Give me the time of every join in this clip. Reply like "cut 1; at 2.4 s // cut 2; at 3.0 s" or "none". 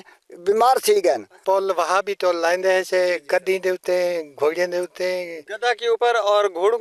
cut 1; at 1.4 s